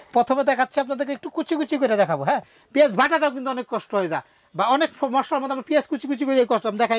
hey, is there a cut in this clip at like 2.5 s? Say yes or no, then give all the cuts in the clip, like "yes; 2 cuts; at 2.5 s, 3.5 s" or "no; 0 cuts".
yes; 1 cut; at 2.5 s